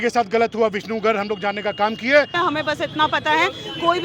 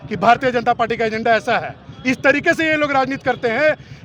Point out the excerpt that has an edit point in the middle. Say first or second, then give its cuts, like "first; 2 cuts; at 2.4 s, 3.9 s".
first; 1 cut; at 2.3 s